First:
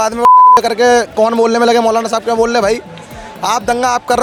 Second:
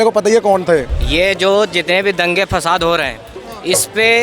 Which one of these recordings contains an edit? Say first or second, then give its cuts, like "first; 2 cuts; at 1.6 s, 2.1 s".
second; 1 cut; at 1.0 s